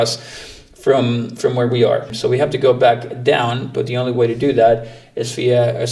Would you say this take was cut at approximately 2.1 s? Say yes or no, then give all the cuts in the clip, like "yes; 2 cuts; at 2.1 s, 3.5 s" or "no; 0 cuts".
yes; 1 cut; at 2.1 s